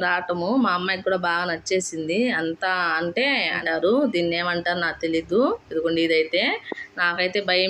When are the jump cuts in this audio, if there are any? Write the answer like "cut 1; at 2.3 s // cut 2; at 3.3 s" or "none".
cut 1; at 3.6 s